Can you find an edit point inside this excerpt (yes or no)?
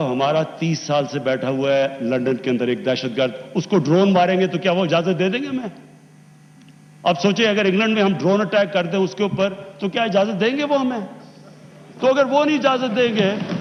no